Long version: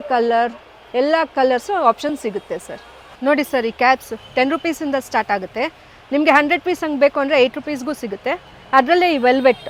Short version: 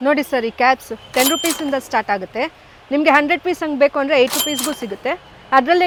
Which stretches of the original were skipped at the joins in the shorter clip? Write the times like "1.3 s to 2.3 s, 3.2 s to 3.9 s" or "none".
none

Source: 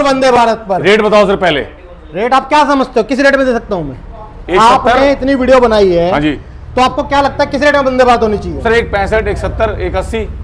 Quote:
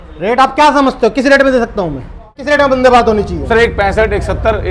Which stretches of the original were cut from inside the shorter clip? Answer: 4.3 s to 7.6 s

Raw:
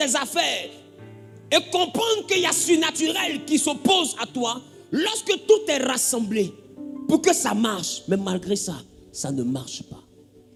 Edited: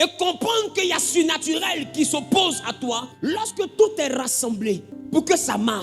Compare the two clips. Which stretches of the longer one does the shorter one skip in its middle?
4.6 s to 4.8 s, 6.6 s to 6.9 s

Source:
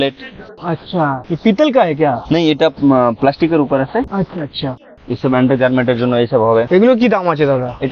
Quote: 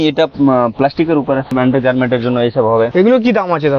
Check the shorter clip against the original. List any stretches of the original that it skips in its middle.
3.9 s to 5.2 s

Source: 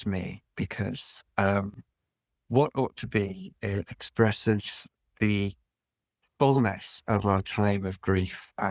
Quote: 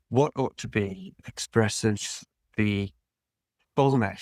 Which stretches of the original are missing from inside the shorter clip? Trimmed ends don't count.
3.6 s to 3.8 s

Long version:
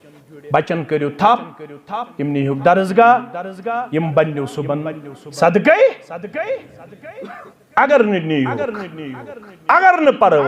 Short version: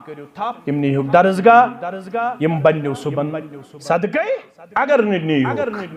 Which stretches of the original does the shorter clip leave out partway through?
6.1 s to 7.6 s

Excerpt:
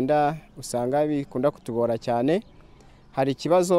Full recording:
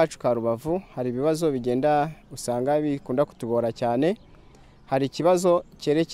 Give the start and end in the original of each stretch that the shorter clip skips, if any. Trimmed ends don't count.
none

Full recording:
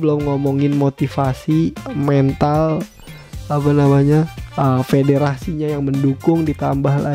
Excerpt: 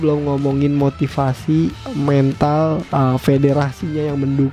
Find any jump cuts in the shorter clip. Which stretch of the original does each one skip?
2.8 s to 4.5 s

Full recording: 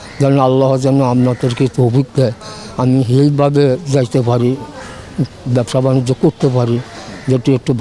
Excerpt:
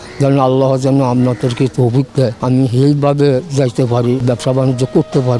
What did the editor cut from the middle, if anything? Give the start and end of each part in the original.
2.4 s to 2.7 s, 4.6 s to 5.5 s

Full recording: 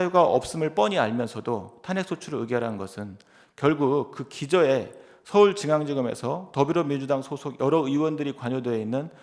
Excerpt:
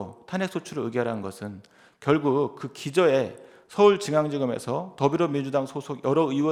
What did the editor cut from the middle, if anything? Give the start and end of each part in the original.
none

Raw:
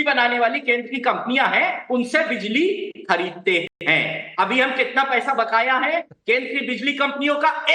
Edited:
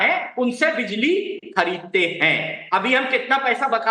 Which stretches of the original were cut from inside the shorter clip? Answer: 3.7 s to 3.8 s

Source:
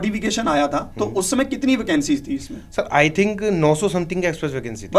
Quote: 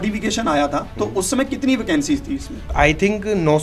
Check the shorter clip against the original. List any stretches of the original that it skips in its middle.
2.6 s to 2.7 s

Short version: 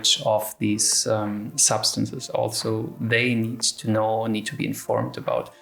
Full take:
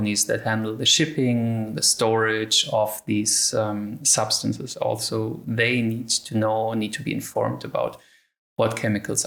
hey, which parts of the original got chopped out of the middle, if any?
none

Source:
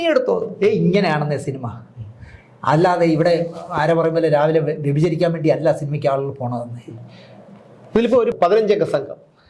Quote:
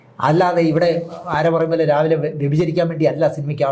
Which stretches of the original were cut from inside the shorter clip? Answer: none

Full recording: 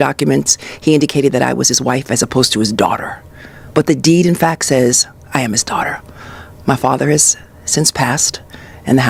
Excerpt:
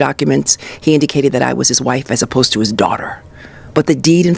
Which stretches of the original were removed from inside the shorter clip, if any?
none

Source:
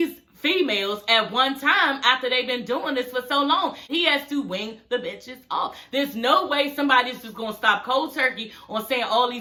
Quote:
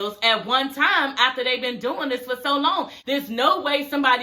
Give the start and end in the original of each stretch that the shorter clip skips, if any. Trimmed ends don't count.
3.8 s to 5.8 s

